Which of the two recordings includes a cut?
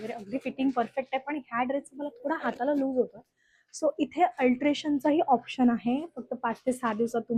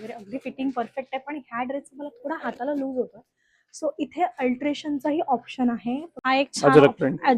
second; 1 cut; at 6.1 s

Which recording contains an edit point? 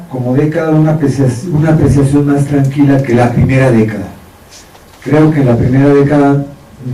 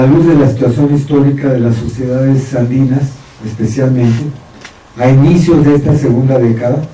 second; 1 cut; at 2.5 s

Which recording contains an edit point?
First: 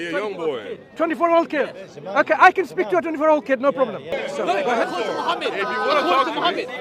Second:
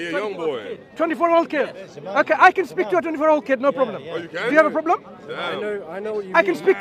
first; 1 cut; at 4.2 s

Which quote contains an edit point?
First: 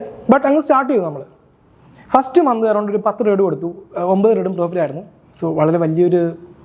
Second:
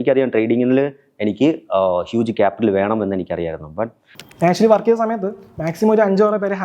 second; 1 cut; at 4.0 s

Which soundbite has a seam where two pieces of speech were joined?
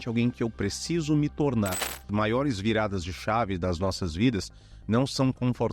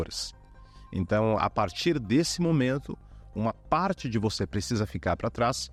first; 1 cut; at 2.0 s

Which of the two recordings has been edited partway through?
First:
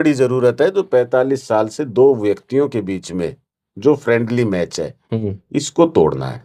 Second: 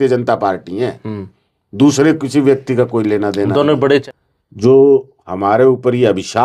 second; 1 cut; at 4.0 s

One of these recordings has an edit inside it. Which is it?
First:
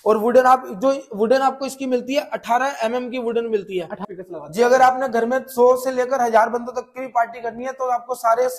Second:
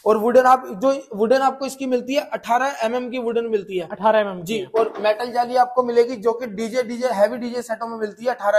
first; 1 cut; at 4.0 s

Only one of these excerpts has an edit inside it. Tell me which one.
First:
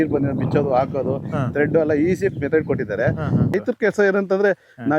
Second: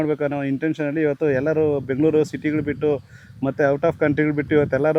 first; 1 cut; at 3.5 s

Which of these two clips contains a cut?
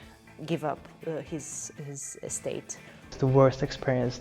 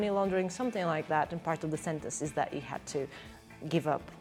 first; 1 cut; at 3.1 s

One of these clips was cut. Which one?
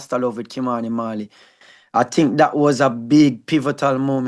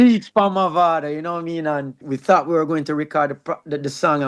second; 1 cut; at 2.1 s

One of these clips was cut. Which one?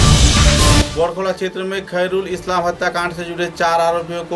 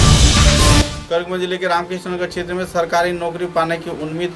second; 1 cut; at 0.9 s

